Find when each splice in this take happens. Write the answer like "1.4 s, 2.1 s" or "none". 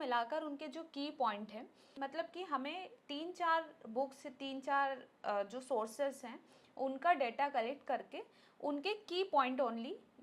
1.8 s